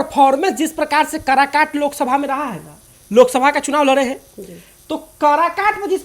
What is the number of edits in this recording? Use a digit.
0